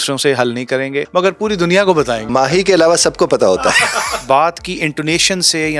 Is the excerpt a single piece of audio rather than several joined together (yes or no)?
no